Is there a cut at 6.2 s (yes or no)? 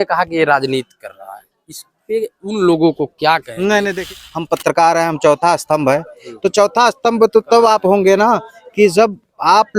no